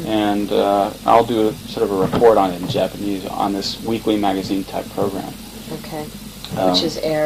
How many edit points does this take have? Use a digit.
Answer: 1